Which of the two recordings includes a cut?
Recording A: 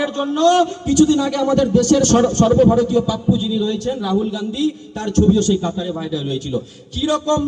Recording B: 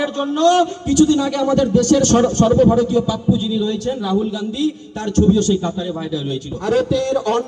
B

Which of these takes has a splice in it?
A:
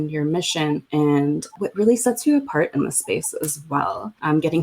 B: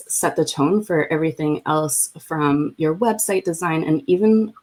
A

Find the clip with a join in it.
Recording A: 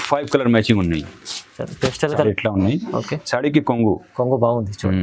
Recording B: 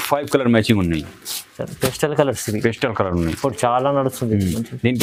A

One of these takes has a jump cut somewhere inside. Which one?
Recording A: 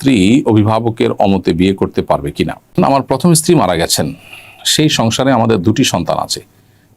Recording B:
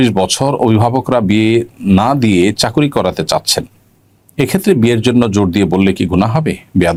A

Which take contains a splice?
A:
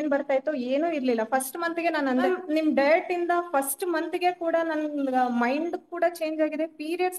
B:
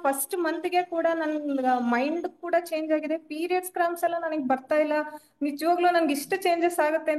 A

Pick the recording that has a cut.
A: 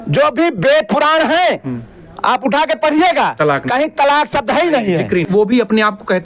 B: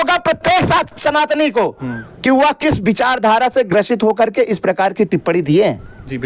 A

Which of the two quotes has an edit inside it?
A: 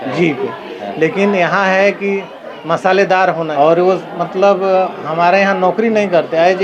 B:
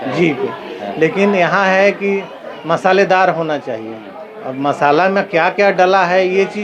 A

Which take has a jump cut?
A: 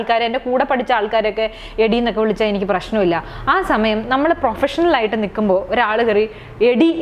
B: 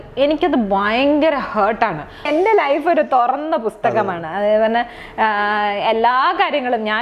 B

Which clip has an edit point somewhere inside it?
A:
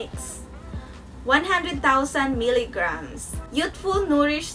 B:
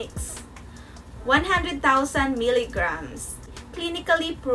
B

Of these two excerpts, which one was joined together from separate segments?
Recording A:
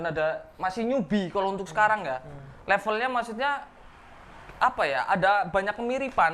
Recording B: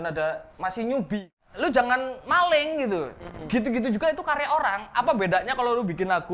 B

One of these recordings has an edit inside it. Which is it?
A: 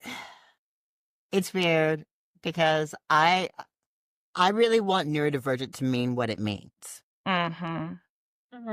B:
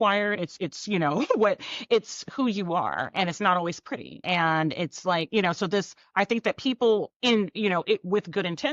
B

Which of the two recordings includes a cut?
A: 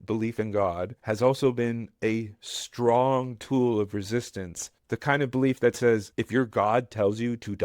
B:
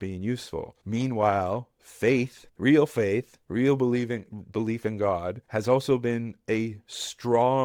A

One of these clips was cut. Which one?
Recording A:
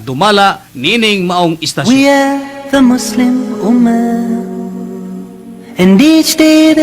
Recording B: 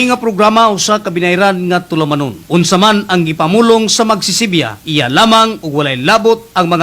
A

